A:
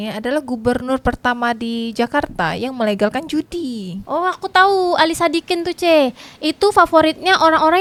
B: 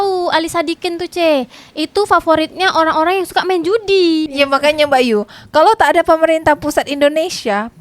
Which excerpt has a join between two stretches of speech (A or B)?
B